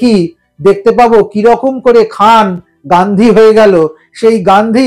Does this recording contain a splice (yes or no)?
no